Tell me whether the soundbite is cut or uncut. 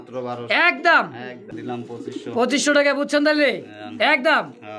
cut